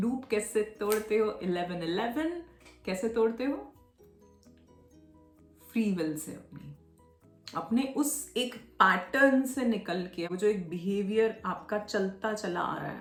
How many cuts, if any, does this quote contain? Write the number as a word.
zero